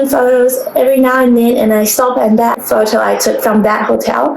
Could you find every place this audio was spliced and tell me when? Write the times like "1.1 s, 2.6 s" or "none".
2.6 s